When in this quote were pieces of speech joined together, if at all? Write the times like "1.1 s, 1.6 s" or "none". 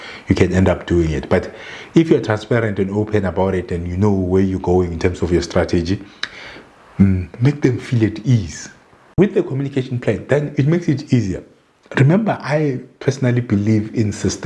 9.2 s